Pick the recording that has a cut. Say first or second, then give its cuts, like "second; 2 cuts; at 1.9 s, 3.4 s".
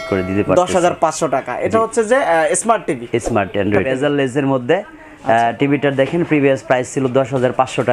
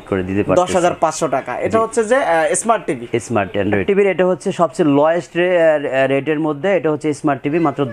first; 1 cut; at 3.8 s